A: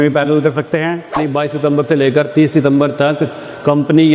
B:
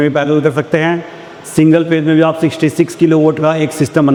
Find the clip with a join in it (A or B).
A